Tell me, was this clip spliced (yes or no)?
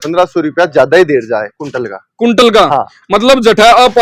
no